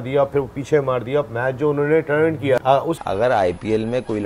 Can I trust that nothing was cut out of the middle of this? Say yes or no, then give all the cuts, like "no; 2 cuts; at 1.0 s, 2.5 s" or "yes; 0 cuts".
yes; 0 cuts